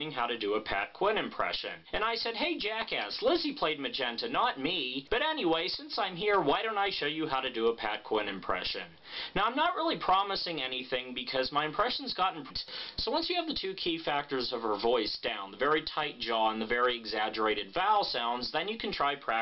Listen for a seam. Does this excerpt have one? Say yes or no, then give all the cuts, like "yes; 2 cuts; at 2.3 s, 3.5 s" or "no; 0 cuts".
no; 0 cuts